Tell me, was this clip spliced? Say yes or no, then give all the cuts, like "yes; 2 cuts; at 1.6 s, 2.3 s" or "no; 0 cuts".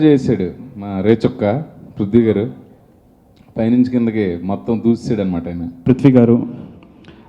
yes; 1 cut; at 5.7 s